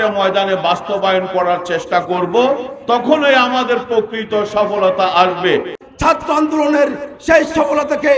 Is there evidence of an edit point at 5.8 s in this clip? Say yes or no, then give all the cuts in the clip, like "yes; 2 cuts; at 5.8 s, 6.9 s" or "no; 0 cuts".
yes; 1 cut; at 5.8 s